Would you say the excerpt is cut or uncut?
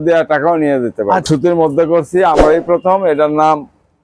cut